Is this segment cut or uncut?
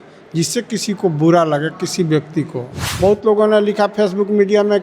cut